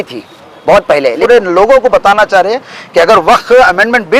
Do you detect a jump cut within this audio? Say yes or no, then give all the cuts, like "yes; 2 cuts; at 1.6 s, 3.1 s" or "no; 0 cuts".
yes; 1 cut; at 1.2 s